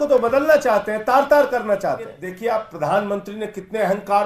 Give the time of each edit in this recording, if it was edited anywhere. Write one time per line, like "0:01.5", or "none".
0:02.2